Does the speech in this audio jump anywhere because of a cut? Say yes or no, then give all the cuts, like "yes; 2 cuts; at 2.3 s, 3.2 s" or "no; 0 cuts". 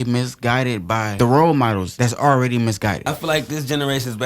yes; 3 cuts; at 1.1 s, 1.9 s, 3.1 s